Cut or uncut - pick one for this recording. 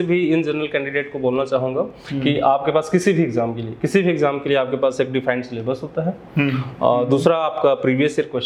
uncut